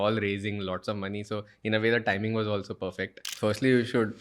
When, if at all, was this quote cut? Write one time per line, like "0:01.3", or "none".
0:03.2